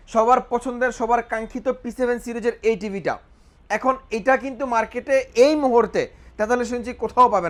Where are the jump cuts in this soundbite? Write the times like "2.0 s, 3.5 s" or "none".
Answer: none

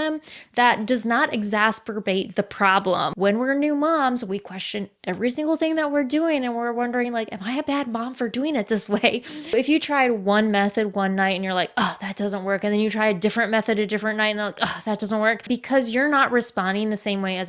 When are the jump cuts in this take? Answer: 3.1 s, 9.5 s, 15.4 s

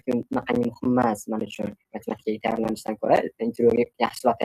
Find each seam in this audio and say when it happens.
none

